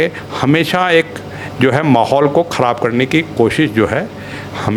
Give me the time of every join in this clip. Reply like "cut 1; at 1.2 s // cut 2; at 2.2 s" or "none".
none